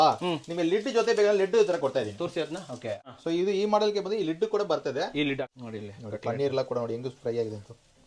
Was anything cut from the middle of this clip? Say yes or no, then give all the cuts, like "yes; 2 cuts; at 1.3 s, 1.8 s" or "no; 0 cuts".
yes; 1 cut; at 5.4 s